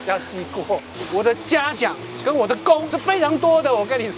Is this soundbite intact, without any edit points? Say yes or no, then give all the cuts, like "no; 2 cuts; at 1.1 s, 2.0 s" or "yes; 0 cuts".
no; 2 cuts; at 1.0 s, 2.9 s